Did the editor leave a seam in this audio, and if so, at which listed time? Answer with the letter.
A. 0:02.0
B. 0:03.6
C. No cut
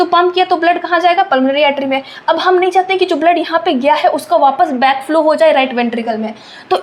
C